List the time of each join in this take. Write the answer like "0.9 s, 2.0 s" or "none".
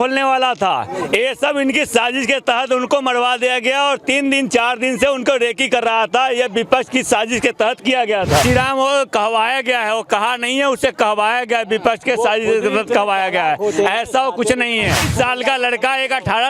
8.4 s